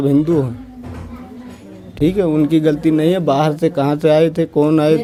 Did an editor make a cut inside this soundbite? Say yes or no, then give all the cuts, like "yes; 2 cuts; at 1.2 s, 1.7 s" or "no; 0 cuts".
no; 0 cuts